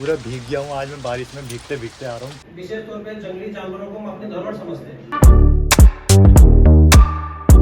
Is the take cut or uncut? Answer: cut